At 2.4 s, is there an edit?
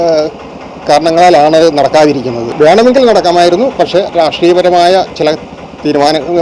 yes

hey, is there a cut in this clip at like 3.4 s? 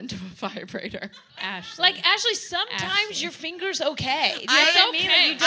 no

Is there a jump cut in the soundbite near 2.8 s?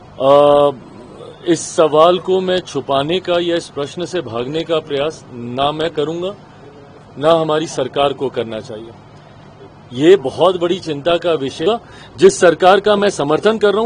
no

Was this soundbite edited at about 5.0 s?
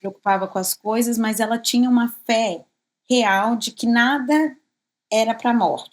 no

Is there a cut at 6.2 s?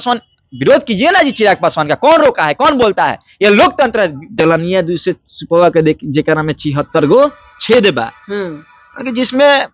no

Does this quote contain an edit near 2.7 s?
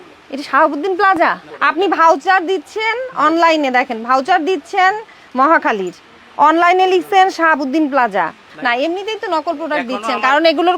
no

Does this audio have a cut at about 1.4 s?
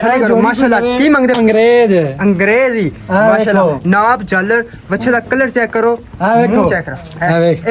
yes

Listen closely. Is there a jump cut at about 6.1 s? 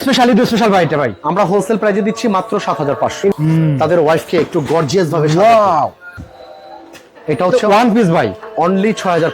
yes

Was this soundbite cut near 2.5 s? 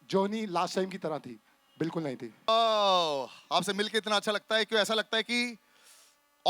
yes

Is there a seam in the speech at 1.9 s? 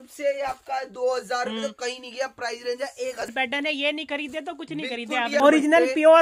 no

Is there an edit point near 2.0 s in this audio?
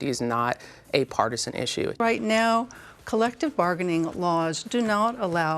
yes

